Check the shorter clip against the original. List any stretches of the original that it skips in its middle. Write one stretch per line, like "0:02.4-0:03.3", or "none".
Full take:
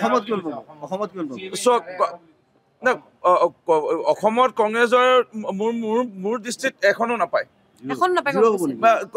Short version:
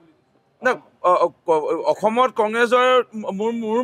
none